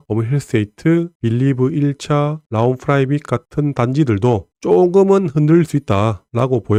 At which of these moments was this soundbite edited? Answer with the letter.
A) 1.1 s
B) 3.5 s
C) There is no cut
C